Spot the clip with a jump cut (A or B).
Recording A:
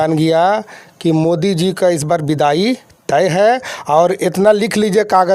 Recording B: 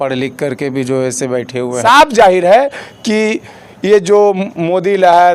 B